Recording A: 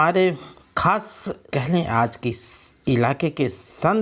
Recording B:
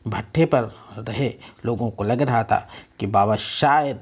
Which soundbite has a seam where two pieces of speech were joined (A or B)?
A